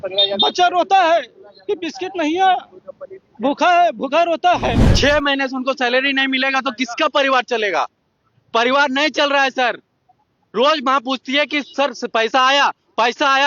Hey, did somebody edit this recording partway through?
yes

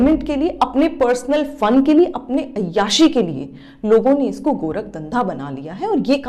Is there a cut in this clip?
no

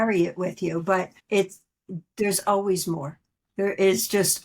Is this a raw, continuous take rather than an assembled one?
no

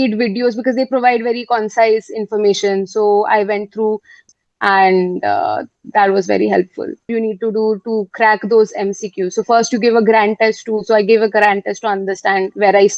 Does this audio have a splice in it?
yes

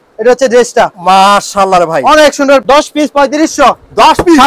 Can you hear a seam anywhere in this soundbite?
yes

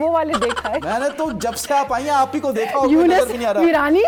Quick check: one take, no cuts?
yes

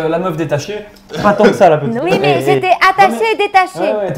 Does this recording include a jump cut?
no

